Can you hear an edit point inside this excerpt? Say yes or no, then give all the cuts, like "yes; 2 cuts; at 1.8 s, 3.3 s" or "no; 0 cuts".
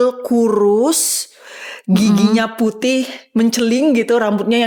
no; 0 cuts